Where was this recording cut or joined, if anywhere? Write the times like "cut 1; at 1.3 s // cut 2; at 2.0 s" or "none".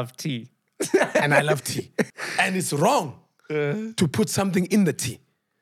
cut 1; at 2.1 s